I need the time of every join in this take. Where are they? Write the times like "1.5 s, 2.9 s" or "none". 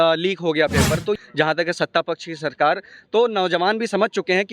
1.2 s